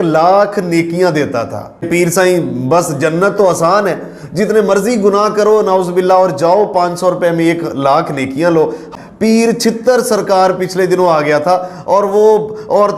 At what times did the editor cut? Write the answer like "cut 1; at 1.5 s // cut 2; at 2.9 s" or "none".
cut 1; at 1.9 s // cut 2; at 8.9 s